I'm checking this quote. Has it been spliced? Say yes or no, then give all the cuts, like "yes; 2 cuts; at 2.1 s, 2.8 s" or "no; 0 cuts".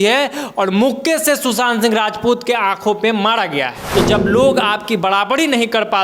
yes; 1 cut; at 3.8 s